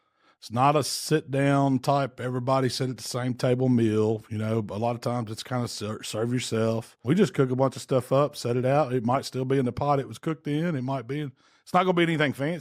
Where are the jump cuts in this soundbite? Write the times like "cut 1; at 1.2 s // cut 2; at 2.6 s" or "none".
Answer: cut 1; at 6.9 s